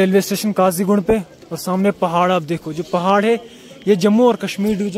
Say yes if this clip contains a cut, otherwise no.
no